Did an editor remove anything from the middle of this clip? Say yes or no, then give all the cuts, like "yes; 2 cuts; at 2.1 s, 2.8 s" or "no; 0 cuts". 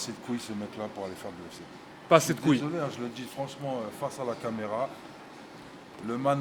no; 0 cuts